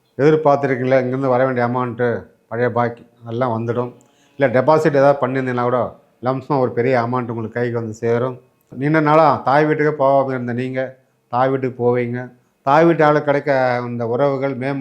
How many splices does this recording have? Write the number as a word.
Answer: one